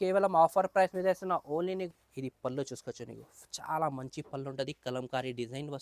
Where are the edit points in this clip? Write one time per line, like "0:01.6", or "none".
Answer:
0:01.9